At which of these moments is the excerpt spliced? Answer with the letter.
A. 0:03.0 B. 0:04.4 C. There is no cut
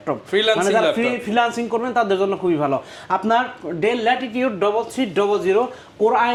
C